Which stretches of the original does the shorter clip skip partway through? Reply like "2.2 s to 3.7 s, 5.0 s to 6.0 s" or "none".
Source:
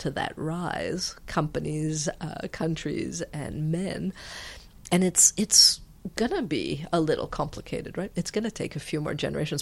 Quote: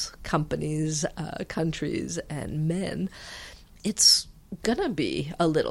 4.8 s to 5.2 s